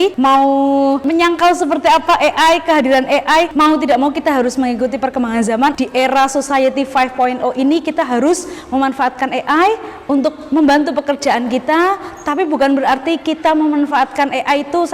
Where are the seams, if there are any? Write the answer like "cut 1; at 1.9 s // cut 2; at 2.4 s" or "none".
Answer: cut 1; at 1.0 s // cut 2; at 3.5 s // cut 3; at 5.7 s